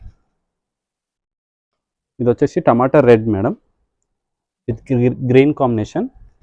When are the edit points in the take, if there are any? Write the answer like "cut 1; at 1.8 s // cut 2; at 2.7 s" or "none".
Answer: none